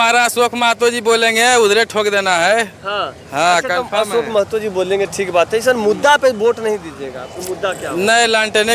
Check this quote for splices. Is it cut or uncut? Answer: uncut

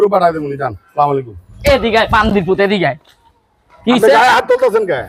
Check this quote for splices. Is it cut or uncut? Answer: uncut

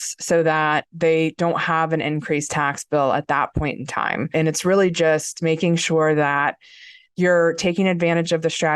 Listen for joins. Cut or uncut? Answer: cut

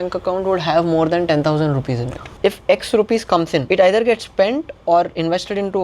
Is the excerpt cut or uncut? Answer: cut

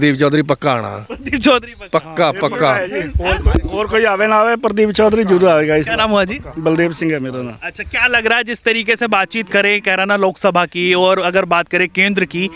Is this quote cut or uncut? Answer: uncut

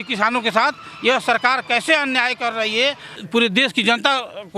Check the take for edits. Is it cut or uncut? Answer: cut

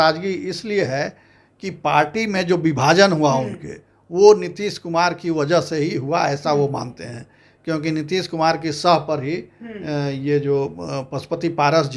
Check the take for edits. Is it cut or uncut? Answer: uncut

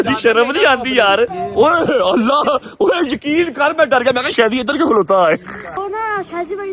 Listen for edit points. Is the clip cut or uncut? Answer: cut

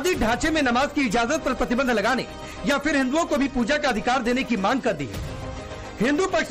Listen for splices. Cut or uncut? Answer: uncut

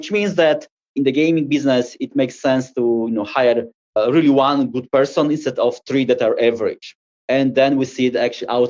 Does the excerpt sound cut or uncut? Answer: uncut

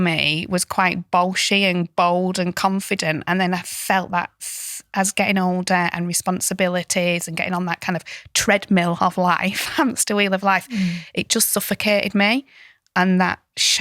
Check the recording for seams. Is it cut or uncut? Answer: uncut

